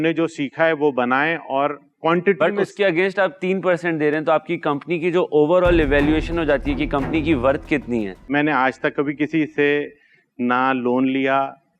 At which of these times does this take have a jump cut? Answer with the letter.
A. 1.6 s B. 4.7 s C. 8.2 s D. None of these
C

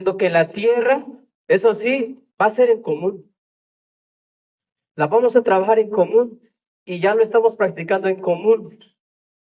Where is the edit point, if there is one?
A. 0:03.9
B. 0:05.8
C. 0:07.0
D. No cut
D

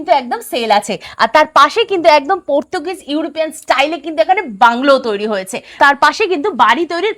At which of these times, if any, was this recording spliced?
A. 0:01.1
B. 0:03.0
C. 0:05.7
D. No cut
C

